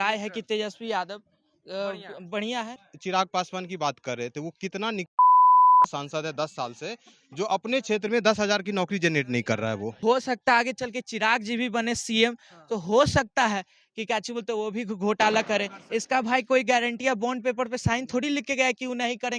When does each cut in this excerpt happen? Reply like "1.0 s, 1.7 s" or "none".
2.8 s, 9.9 s